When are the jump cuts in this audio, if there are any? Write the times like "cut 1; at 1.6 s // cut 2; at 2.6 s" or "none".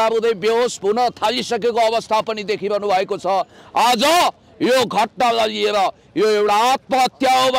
none